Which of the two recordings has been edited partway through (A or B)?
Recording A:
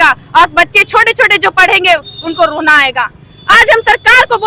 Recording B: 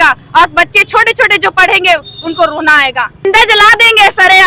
B